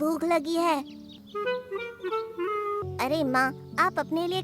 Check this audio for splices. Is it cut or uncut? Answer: cut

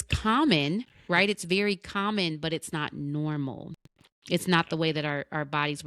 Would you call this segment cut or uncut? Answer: uncut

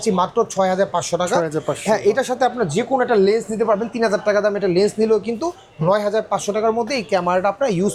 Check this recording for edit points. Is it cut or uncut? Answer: uncut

